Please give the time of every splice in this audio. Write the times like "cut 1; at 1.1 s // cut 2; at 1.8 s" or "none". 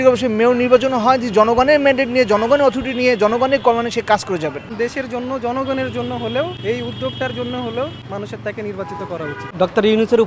cut 1; at 4.7 s // cut 2; at 6.6 s // cut 3; at 8.0 s // cut 4; at 9.4 s